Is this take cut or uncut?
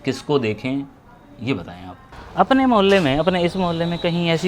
cut